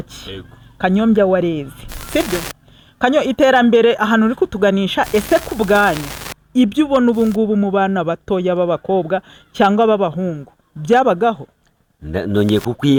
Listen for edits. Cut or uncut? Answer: uncut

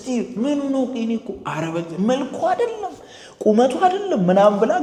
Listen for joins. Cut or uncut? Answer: uncut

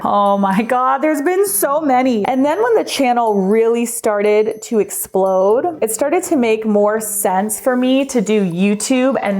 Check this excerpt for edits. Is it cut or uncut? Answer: cut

